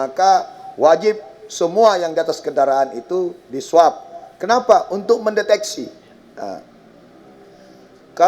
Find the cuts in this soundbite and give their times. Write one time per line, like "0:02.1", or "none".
none